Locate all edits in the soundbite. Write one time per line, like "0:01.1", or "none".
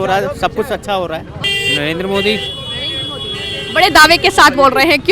0:01.5